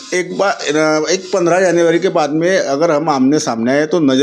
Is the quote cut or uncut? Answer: uncut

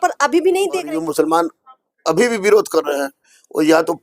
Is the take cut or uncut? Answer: cut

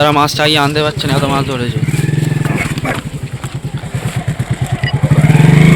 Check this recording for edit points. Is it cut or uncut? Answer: cut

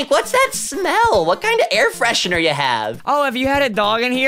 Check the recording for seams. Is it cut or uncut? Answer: cut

